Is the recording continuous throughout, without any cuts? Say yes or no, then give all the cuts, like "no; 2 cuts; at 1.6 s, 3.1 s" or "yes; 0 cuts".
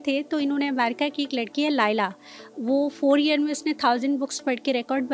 yes; 0 cuts